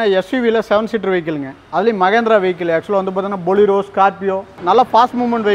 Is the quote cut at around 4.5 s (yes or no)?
yes